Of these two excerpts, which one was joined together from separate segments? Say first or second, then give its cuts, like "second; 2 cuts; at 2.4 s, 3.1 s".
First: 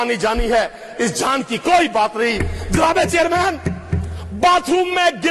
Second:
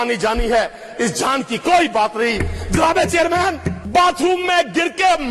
second; 1 cut; at 3.7 s